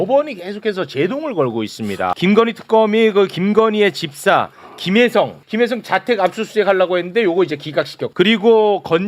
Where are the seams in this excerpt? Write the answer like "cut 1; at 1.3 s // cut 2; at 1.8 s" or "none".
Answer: cut 1; at 2.1 s // cut 2; at 5.4 s // cut 3; at 8.0 s